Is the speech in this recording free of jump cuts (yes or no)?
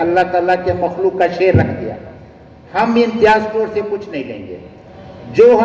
yes